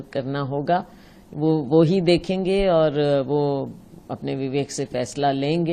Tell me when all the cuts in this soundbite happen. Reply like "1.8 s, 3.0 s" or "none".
none